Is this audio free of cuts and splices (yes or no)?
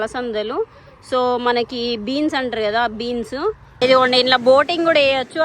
no